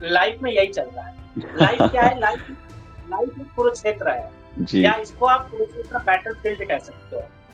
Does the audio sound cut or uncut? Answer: uncut